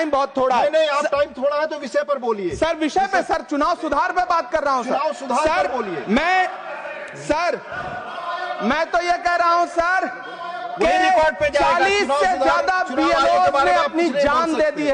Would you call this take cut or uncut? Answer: uncut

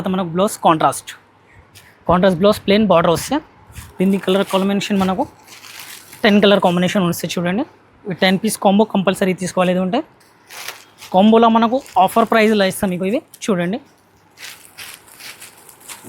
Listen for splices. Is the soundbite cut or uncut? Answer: uncut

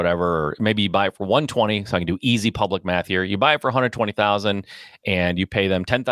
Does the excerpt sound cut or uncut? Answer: uncut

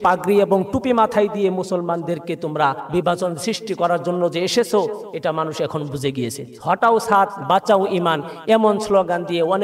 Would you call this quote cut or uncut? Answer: cut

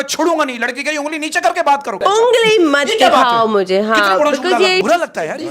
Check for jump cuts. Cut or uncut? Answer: cut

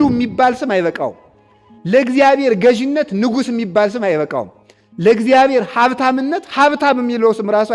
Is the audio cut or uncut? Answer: uncut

